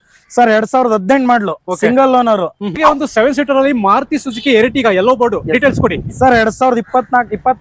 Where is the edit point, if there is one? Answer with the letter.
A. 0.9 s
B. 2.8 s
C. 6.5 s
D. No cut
B